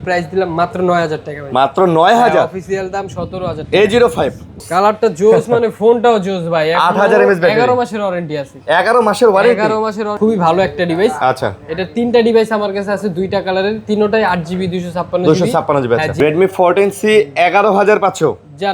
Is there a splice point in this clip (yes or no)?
yes